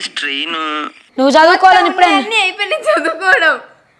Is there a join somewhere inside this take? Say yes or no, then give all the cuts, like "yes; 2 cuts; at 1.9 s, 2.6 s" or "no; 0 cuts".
yes; 1 cut; at 1.0 s